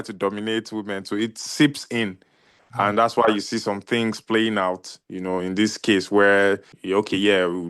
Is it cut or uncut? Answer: cut